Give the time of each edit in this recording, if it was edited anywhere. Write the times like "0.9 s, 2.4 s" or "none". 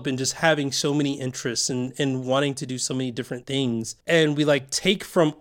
3.6 s